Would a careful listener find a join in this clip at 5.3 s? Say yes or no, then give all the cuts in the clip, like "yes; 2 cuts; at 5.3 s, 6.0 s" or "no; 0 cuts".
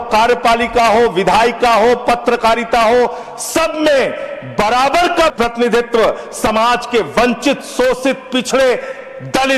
yes; 1 cut; at 5.3 s